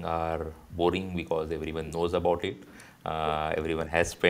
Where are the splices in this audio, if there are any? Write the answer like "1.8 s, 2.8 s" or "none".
none